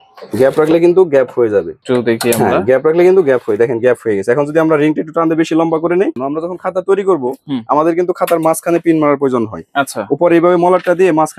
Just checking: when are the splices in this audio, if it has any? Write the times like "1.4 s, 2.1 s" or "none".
1.8 s, 6.2 s